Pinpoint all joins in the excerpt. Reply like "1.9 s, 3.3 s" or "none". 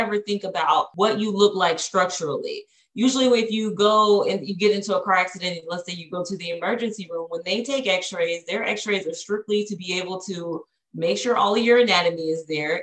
0.9 s